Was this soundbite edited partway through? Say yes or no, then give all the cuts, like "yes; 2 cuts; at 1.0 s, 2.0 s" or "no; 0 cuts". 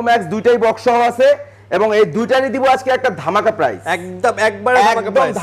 no; 0 cuts